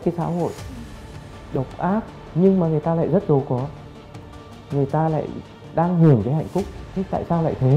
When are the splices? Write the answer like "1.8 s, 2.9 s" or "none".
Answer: 2.2 s